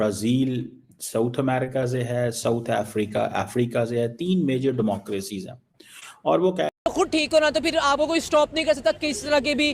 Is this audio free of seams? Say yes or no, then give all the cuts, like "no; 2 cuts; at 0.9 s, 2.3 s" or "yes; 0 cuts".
no; 1 cut; at 6.7 s